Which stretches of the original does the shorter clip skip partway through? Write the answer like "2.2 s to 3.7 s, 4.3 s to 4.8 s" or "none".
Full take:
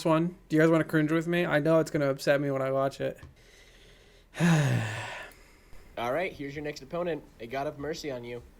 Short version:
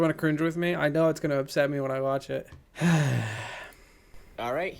3.3 s to 4.2 s